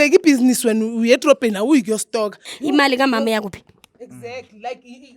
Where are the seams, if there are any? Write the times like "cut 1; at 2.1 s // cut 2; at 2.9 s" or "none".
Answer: cut 1; at 2.5 s